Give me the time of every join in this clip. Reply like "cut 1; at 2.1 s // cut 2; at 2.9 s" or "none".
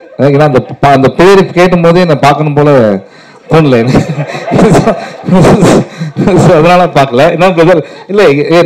none